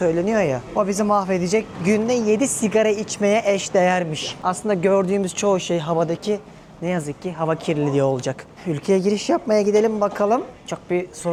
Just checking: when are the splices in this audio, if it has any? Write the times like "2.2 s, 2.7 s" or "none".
none